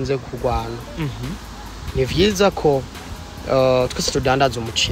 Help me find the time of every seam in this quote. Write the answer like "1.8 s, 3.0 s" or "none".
none